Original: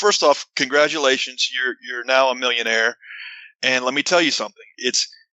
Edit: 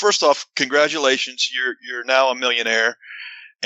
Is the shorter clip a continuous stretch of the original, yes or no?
yes